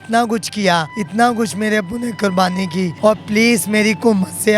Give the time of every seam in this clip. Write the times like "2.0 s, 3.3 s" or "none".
1.0 s, 2.9 s